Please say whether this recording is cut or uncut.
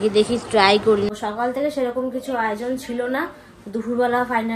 cut